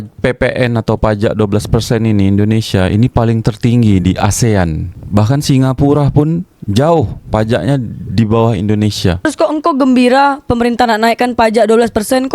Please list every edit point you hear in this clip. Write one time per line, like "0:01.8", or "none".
0:09.2